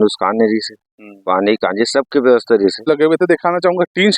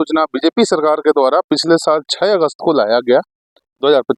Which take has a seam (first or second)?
first